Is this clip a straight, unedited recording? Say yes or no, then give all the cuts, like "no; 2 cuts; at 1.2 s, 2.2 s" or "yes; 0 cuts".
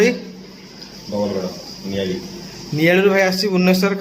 yes; 0 cuts